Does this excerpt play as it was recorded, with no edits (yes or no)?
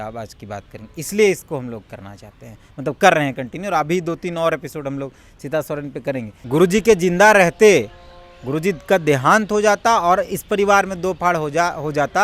no